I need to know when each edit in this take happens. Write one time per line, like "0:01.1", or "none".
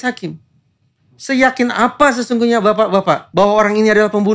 0:03.2